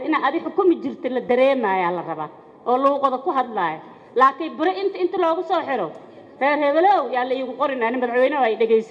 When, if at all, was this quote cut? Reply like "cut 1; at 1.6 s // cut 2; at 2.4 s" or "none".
none